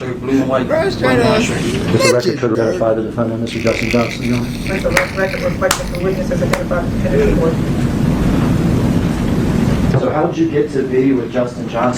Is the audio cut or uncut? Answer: uncut